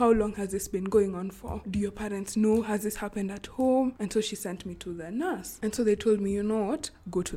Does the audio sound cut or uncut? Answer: cut